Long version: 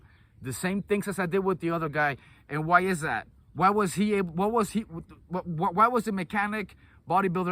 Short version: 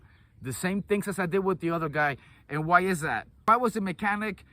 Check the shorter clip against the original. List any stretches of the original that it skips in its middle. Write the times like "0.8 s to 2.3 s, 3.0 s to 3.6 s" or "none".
3.4 s to 5.7 s